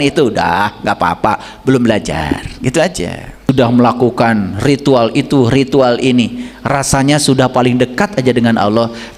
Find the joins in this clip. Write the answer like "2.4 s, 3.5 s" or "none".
3.5 s

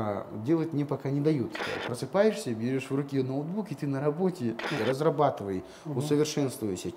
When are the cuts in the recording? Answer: 1.6 s, 4.7 s

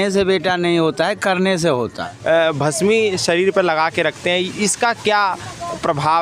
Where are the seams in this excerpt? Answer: 2.1 s

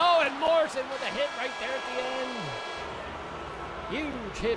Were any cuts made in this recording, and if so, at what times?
none

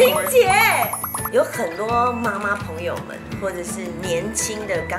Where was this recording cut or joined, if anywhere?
none

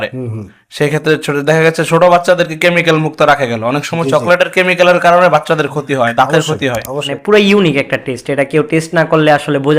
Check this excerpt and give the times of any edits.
7.1 s

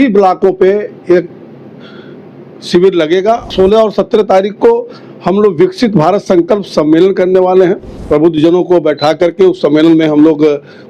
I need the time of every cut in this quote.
3.5 s, 7.9 s

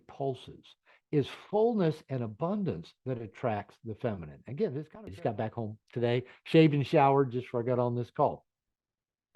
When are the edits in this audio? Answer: 5.1 s

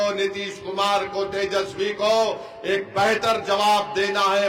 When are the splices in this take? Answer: none

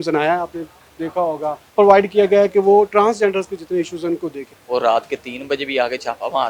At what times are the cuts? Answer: 1.6 s, 4.5 s

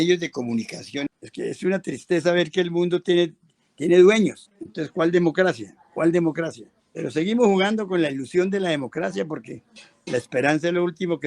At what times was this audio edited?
1.1 s

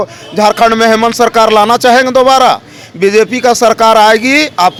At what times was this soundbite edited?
none

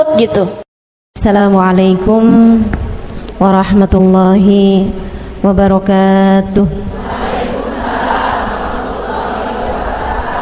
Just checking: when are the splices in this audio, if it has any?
1.2 s

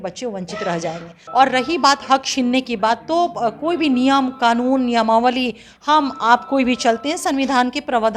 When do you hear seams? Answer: 1.1 s

